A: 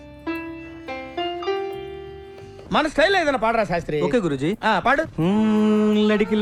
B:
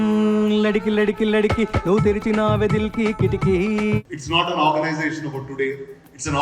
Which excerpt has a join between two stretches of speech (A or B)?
B